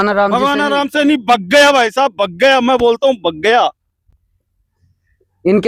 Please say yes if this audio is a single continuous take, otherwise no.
yes